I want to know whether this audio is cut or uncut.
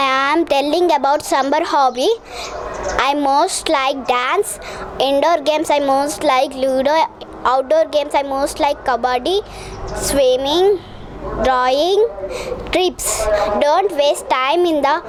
uncut